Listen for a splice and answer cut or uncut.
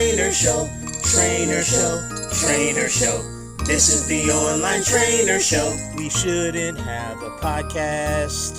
uncut